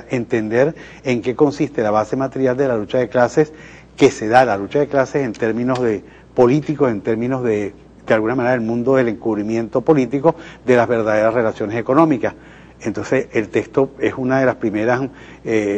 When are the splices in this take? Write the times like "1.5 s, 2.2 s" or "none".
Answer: 6.9 s